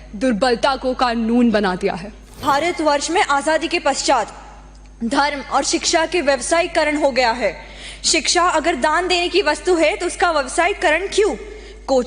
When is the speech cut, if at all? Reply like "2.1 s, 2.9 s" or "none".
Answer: 2.4 s